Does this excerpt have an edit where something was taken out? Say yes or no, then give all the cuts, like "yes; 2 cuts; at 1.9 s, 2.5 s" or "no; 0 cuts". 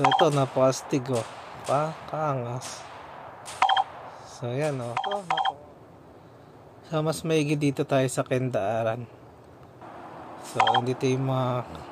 yes; 1 cut; at 5.1 s